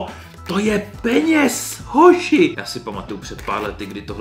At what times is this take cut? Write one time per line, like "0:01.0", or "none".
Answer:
0:02.5

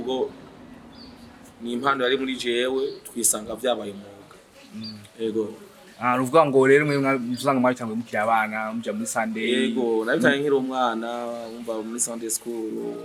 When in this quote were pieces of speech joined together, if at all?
none

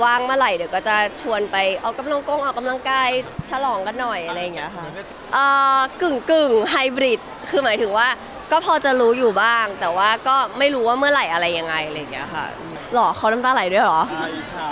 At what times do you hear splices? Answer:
0:05.1
0:12.8

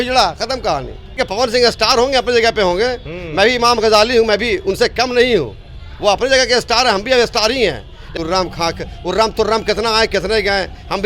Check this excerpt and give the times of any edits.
0:01.0
0:08.0

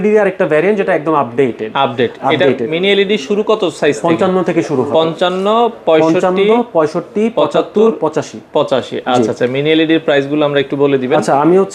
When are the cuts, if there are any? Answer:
none

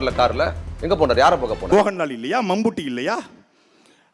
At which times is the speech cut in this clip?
0:01.7

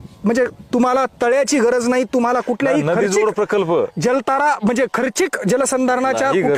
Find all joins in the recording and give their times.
none

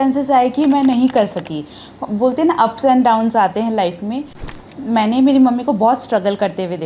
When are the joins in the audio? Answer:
0:04.4

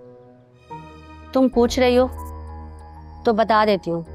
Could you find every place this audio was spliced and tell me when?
0:01.2

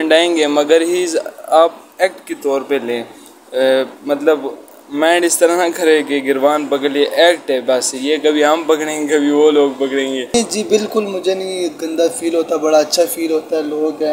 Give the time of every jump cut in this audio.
0:10.3

